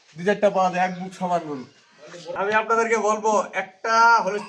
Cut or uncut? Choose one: cut